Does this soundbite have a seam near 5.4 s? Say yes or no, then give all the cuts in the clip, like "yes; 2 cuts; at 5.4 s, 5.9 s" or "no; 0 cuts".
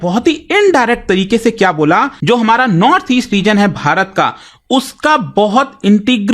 no; 1 cut; at 2.1 s